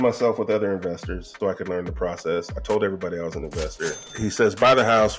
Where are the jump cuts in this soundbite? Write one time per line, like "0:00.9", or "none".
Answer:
0:01.2
0:03.9